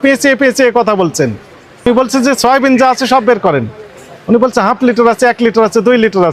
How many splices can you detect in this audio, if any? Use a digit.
1